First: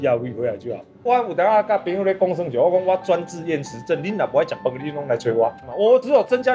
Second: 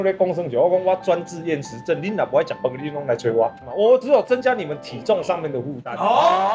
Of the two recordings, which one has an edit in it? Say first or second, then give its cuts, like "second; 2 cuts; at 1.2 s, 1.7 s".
first; 1 cut; at 1.0 s